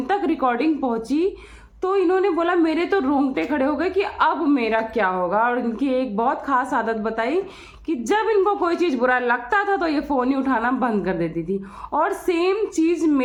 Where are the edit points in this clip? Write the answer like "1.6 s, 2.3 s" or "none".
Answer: none